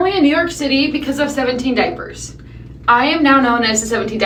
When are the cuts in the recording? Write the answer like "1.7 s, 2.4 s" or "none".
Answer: none